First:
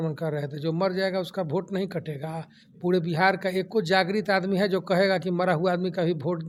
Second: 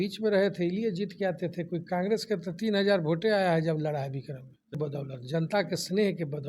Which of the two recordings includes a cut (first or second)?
second